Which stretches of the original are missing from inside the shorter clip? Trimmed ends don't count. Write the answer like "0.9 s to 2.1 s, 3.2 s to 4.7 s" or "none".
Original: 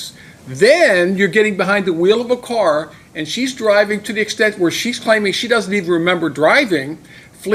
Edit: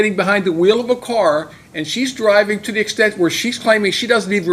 none